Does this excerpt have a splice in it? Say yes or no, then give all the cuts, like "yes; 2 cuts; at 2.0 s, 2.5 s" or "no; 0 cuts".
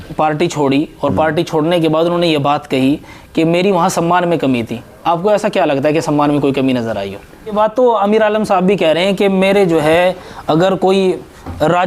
yes; 1 cut; at 7.5 s